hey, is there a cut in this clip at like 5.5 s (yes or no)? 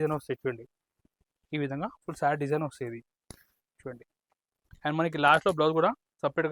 no